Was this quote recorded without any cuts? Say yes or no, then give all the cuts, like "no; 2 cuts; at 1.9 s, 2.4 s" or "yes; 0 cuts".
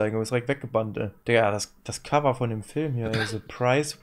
no; 1 cut; at 1.1 s